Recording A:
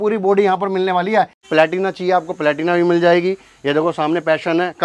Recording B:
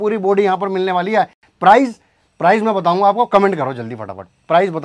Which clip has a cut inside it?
A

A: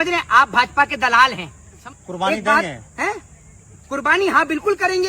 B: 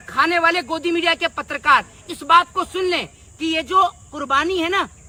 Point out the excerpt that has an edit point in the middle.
A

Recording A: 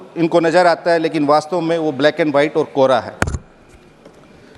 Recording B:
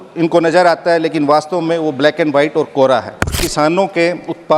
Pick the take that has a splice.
B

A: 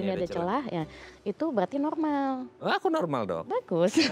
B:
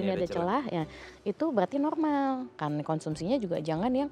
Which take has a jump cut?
B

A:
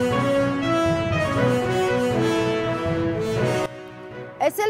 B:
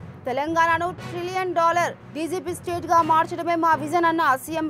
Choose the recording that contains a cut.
A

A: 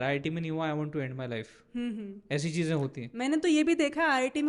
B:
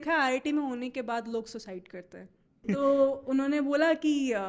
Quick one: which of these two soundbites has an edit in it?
B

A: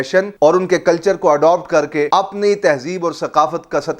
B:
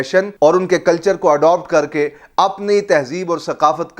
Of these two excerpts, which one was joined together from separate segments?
A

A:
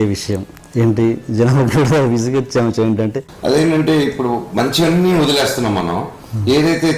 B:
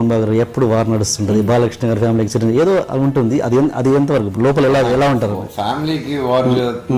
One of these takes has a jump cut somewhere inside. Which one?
A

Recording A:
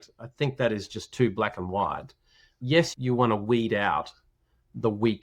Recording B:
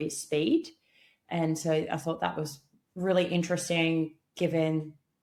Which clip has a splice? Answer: A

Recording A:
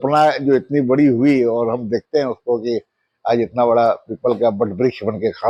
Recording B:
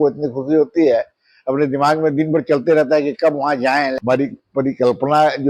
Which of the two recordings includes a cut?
B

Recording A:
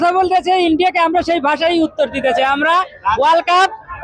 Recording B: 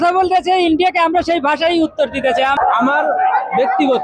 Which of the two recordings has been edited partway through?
B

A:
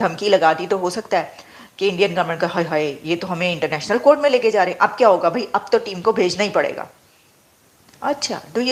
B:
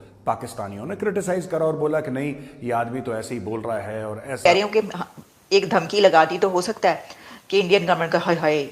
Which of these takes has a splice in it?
B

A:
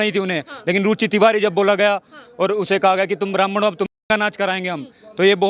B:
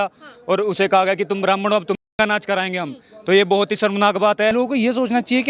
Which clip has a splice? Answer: B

